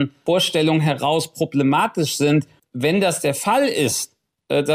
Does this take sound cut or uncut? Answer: cut